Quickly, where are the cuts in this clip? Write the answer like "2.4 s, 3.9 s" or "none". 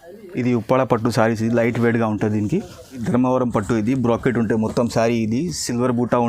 3.0 s